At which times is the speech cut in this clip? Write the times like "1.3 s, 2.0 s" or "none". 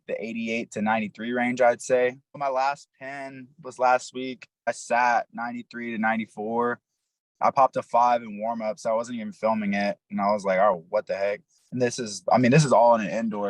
2.4 s, 4.7 s

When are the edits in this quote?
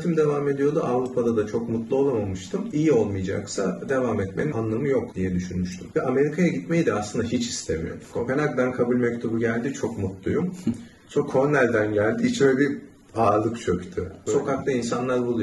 8.1 s, 14.1 s

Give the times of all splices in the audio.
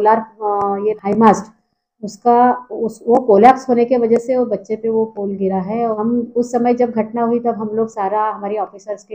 1.0 s, 6.0 s

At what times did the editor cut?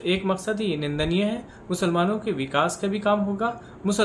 none

